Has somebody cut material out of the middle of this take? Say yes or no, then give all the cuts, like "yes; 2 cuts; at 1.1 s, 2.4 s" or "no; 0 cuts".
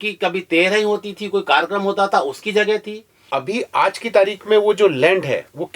yes; 1 cut; at 3.4 s